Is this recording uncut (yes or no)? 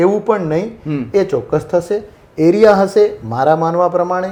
yes